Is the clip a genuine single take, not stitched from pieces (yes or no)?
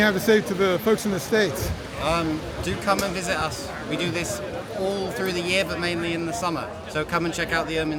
yes